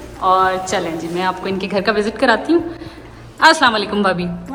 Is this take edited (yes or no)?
no